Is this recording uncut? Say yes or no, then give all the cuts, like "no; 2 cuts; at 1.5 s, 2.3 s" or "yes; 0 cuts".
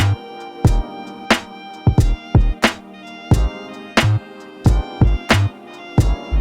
no; 1 cut; at 2.7 s